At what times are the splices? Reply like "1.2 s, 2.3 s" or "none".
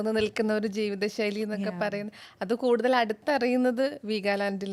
none